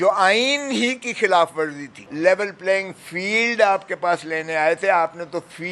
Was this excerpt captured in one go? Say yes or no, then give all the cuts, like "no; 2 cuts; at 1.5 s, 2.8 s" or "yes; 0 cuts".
no; 1 cut; at 2.0 s